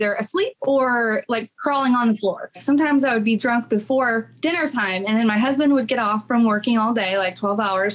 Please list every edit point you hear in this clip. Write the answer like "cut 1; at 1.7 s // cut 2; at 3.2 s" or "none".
cut 1; at 2.6 s